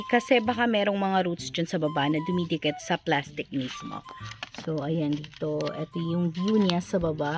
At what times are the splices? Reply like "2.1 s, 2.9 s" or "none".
none